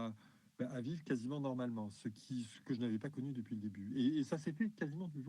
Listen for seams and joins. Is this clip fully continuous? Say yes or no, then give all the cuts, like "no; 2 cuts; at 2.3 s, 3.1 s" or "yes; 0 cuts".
yes; 0 cuts